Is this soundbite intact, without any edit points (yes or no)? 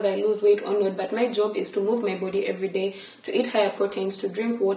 yes